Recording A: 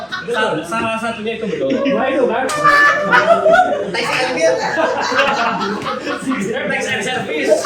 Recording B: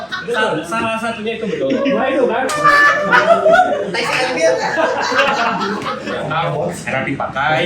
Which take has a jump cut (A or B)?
B